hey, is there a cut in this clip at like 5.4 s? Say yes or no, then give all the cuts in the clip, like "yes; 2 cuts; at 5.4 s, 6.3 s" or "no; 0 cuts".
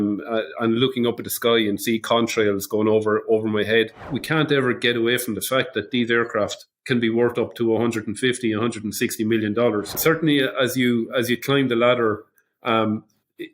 no; 2 cuts; at 4.1 s, 10.0 s